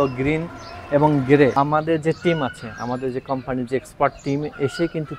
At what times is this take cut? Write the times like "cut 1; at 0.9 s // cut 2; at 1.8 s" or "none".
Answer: cut 1; at 1.5 s